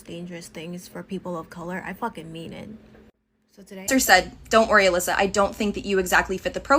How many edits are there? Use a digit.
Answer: 1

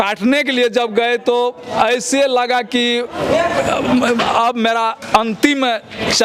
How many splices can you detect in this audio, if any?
0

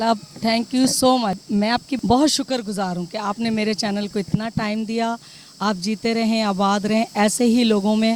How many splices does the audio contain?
1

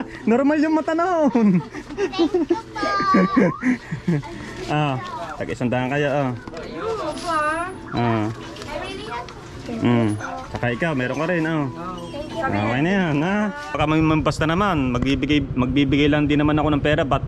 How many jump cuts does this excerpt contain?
1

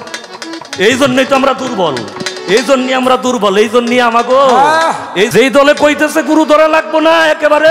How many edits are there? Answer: 1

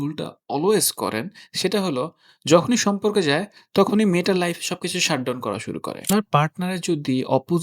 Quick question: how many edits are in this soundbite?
1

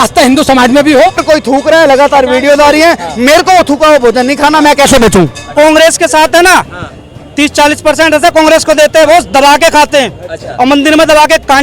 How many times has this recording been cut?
2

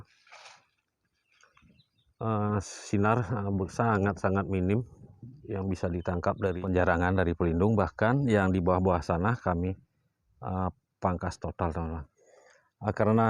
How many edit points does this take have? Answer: 1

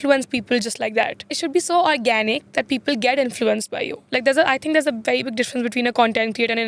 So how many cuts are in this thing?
1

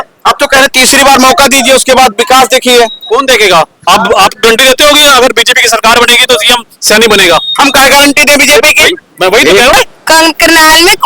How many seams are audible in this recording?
1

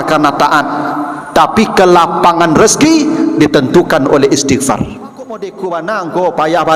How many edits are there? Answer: 1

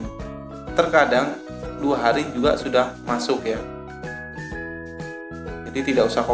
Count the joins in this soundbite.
0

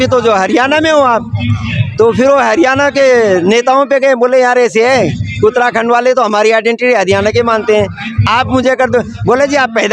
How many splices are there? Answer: 0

